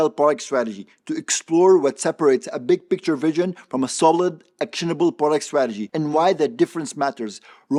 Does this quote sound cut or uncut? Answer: uncut